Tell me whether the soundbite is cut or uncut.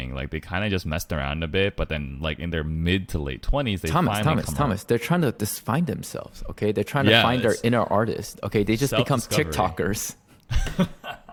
uncut